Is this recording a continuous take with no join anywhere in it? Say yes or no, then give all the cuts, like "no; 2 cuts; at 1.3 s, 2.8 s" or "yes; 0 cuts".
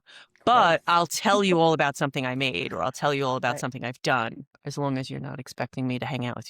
no; 1 cut; at 4.5 s